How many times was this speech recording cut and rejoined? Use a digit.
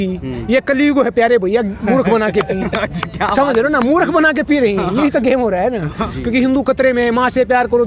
1